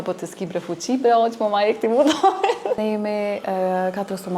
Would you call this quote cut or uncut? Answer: cut